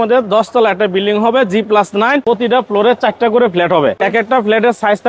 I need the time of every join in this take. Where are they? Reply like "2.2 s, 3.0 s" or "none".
2.2 s, 4.0 s